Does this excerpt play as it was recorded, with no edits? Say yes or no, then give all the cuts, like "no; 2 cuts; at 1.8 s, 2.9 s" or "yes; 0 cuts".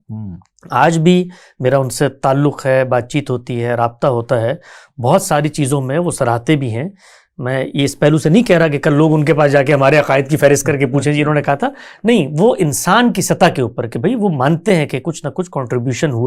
yes; 0 cuts